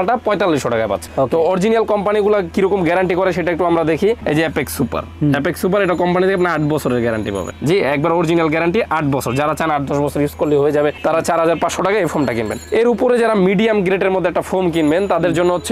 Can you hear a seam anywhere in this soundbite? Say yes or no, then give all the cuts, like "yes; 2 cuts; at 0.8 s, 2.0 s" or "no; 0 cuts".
no; 0 cuts